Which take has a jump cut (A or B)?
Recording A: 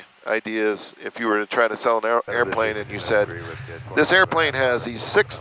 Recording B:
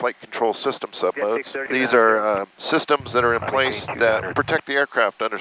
B